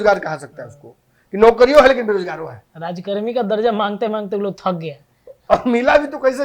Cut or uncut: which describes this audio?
uncut